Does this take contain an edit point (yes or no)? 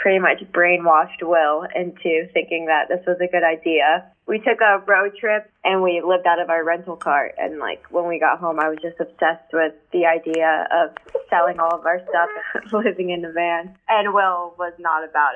yes